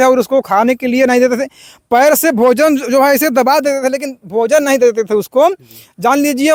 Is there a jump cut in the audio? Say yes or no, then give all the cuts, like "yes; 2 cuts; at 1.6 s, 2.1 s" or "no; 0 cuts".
no; 0 cuts